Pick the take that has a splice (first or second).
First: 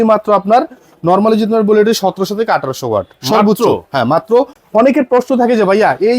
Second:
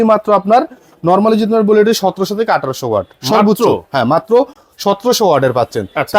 first